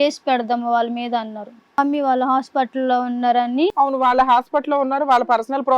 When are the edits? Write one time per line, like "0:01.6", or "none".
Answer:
0:01.7